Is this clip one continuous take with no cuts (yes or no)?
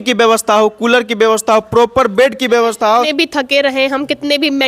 no